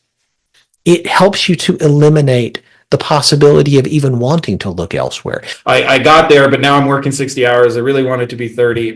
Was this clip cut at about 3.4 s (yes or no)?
no